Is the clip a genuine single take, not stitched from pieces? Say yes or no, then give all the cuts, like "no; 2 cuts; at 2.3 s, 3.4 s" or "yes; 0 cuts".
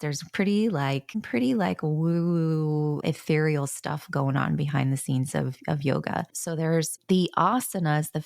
no; 3 cuts; at 1.2 s, 3.0 s, 6.9 s